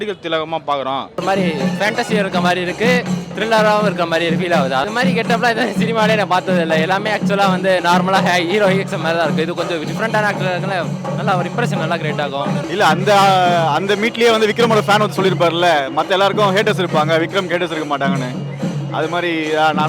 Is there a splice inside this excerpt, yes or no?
yes